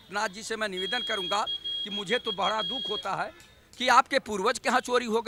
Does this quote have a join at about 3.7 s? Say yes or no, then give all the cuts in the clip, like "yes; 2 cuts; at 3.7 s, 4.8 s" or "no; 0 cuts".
no; 0 cuts